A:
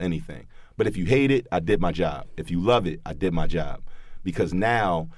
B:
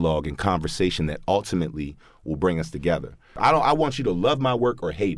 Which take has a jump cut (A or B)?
B